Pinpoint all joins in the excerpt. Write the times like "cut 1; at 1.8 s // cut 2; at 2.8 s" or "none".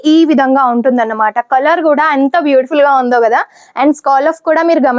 none